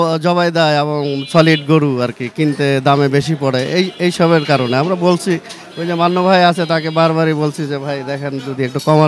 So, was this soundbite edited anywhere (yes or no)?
no